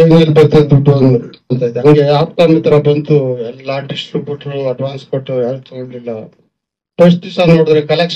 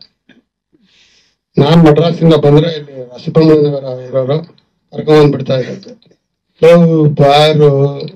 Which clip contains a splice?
first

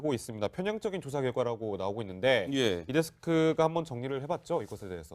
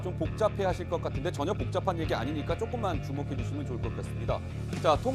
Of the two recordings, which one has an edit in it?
first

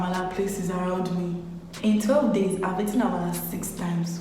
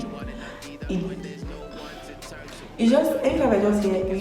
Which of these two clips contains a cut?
first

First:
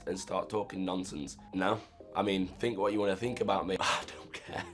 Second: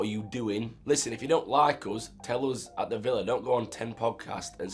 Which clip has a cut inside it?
first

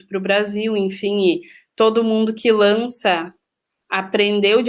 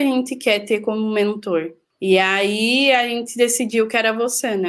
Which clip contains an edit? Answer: second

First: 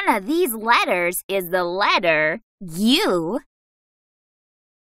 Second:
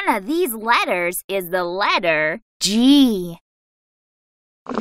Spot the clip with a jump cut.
second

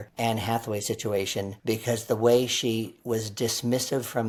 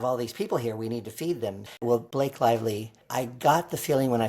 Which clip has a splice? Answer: second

